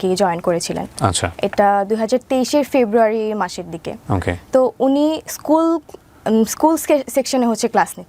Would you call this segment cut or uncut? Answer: uncut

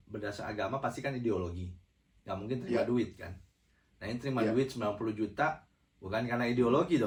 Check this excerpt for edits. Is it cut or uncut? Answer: uncut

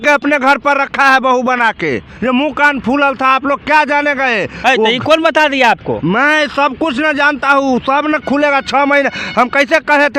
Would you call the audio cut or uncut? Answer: uncut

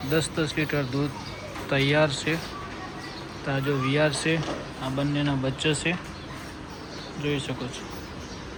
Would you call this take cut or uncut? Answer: uncut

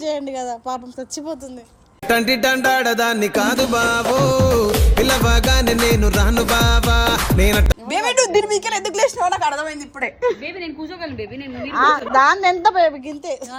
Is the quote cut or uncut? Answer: uncut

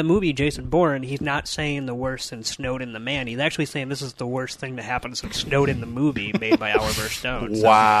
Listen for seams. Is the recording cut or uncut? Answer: uncut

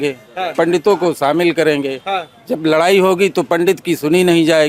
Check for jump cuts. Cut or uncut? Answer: uncut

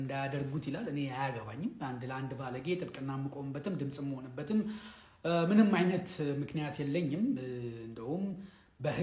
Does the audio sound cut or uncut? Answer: uncut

